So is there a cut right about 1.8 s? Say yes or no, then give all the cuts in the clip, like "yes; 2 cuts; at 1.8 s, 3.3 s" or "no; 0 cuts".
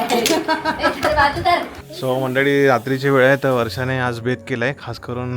yes; 1 cut; at 1.8 s